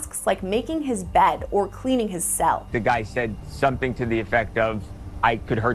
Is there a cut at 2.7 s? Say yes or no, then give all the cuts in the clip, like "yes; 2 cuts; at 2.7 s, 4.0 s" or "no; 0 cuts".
yes; 1 cut; at 2.7 s